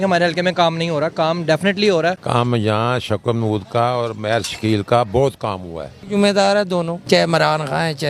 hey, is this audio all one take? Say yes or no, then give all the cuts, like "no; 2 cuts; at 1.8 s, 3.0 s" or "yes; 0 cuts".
no; 3 cuts; at 2.2 s, 6.0 s, 7.0 s